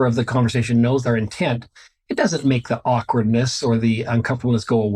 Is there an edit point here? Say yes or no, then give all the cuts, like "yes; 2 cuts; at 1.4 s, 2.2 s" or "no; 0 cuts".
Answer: yes; 1 cut; at 1.0 s